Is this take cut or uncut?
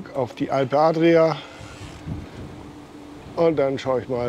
uncut